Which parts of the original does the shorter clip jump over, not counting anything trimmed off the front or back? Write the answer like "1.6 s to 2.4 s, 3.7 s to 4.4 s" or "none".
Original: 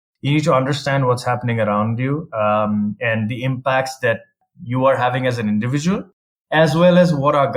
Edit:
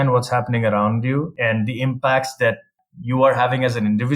2.3 s to 3.0 s